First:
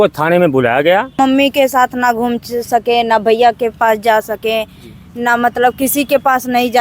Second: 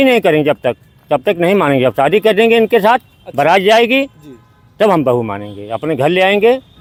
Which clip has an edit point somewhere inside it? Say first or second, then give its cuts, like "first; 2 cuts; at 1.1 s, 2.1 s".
first; 1 cut; at 1.2 s